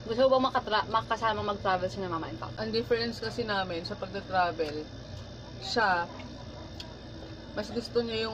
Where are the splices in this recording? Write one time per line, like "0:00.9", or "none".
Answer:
0:02.4